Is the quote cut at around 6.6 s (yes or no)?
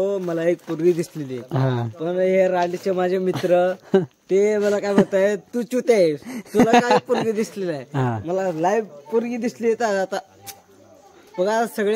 no